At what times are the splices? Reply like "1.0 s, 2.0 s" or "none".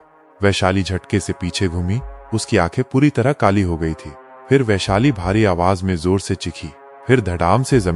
6.8 s